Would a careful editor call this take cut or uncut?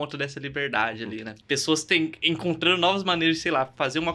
cut